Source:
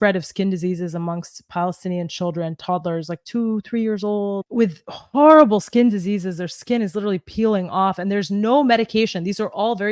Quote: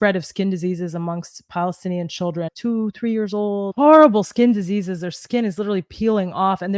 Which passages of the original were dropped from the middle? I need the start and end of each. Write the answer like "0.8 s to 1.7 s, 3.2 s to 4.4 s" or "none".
2.5 s to 3.2 s, 4.4 s to 5.1 s

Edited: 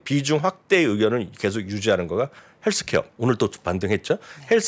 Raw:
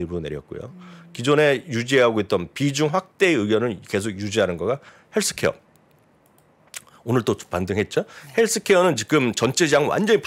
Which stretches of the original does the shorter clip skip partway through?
5.6 s to 7.0 s

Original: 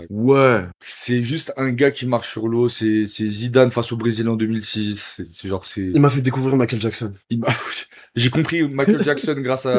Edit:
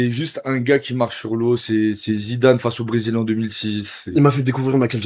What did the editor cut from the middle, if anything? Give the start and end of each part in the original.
5.2 s to 5.9 s

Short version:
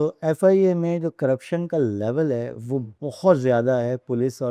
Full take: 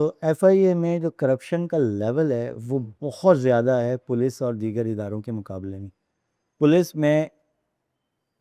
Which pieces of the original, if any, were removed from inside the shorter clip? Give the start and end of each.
none

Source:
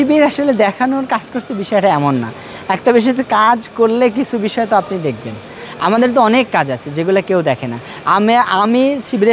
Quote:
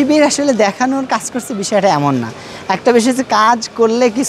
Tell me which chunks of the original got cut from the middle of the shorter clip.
none

